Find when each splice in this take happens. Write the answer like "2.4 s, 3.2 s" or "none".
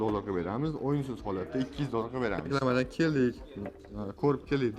2.4 s